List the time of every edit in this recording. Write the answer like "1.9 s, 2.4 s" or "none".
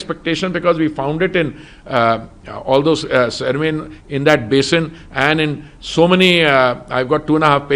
none

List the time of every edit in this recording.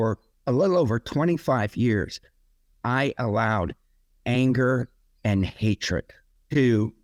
none

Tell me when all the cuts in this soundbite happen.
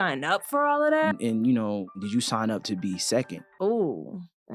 1.1 s, 2.0 s, 3.4 s

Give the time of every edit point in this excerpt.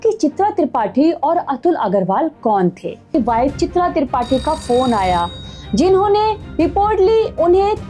3.1 s

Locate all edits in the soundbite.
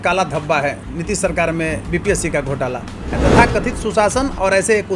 3.1 s

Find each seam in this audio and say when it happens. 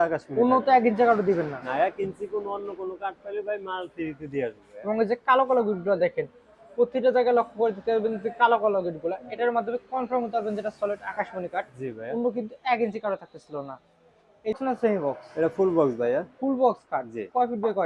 14.6 s

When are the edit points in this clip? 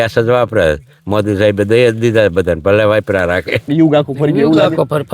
3.7 s

